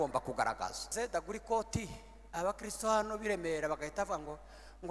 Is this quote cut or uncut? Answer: cut